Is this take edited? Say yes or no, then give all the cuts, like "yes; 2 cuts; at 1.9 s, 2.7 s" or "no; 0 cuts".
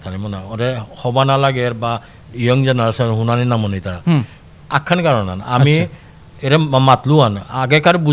no; 0 cuts